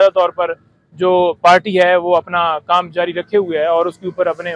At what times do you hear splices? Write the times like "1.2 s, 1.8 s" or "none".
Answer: none